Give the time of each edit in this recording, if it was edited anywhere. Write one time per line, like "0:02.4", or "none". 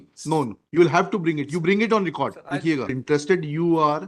0:03.0